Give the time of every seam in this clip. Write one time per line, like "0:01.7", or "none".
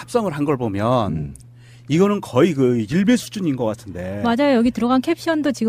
0:01.0

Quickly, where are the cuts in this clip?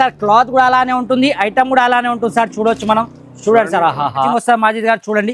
0:04.2

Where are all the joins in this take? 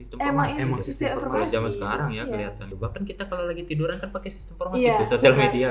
0:02.7

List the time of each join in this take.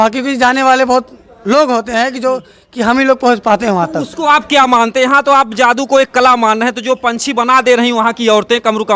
none

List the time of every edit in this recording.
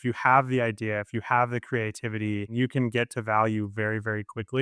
0:02.5

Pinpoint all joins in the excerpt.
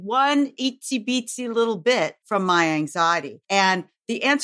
0:02.2
0:03.3

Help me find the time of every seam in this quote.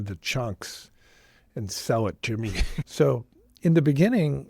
0:02.7

